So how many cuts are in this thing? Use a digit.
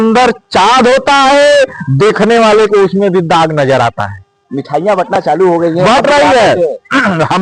0